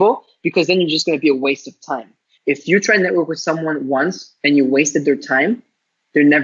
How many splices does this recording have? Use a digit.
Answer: 1